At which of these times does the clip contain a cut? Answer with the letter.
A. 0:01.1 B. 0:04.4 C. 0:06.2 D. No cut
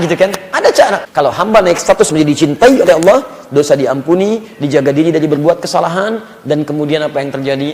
A